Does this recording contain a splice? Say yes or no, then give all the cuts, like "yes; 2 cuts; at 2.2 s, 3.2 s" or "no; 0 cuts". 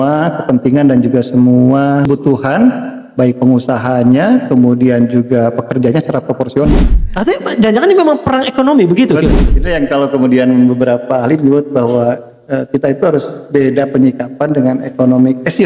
yes; 2 cuts; at 2.1 s, 6.9 s